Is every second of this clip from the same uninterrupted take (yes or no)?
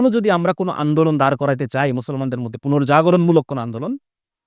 yes